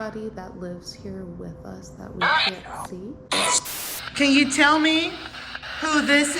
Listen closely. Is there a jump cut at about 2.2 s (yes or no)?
no